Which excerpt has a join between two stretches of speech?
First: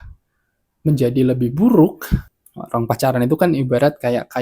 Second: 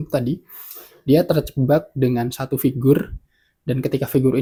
first; 1 cut; at 2.2 s

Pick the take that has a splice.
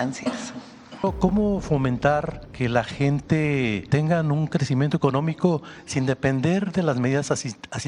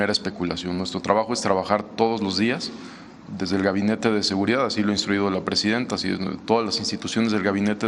first; 3 cuts; at 1.0 s, 2.4 s, 3.8 s

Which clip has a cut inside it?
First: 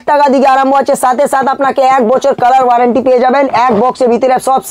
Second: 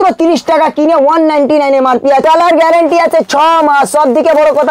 second; 1 cut; at 2.2 s

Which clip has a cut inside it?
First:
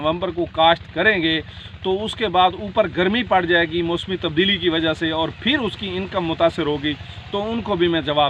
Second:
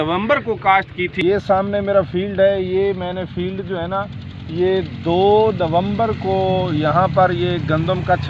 second; 1 cut; at 1.1 s

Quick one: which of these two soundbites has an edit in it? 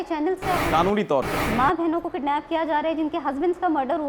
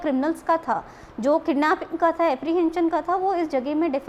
first; 1 cut; at 1.4 s

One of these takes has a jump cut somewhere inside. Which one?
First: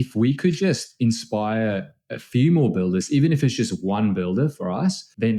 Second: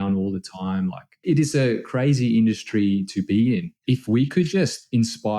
second; 1 cut; at 1.2 s

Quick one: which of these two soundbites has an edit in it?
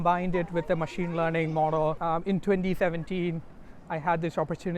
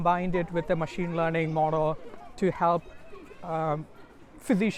first; 1 cut; at 2.0 s

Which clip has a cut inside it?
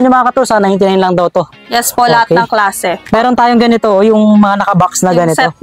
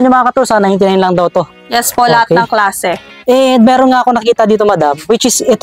first; 1 cut; at 3.1 s

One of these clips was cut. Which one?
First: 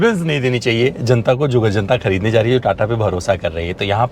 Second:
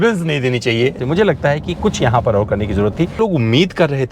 second; 2 cuts; at 1.0 s, 3.2 s

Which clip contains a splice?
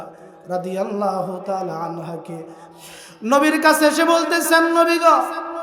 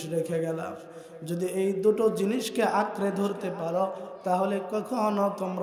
first; 1 cut; at 2.6 s

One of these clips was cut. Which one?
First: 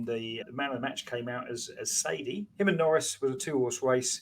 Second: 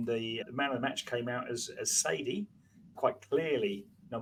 first; 1 cut; at 2.4 s

